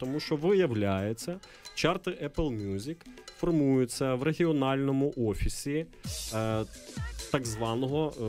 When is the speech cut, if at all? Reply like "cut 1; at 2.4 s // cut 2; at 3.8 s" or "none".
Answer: none